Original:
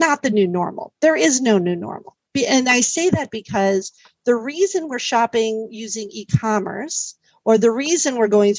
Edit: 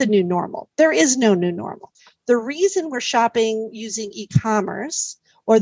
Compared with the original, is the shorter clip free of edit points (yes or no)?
no